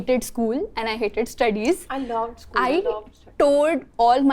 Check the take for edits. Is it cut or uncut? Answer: uncut